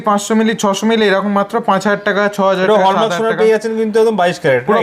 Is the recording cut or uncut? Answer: uncut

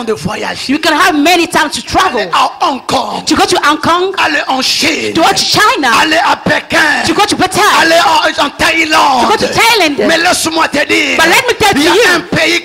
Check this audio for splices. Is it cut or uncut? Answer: uncut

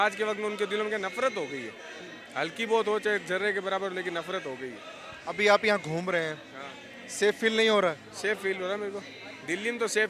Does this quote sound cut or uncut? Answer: uncut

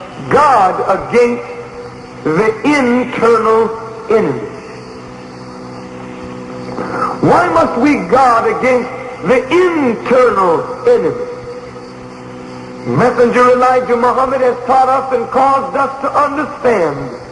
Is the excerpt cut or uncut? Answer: uncut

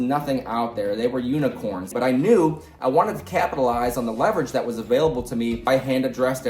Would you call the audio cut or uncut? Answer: cut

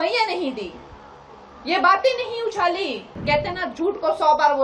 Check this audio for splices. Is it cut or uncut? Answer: cut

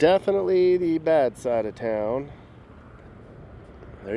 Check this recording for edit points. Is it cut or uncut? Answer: cut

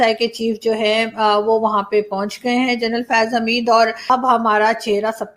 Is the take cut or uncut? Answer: cut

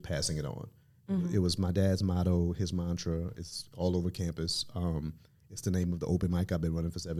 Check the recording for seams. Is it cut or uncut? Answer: uncut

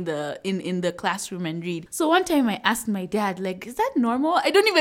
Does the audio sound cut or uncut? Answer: uncut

